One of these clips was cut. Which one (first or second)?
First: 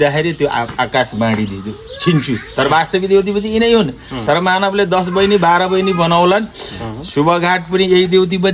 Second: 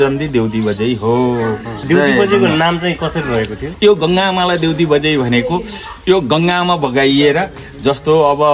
second